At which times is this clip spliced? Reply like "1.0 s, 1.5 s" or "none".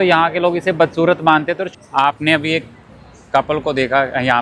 1.6 s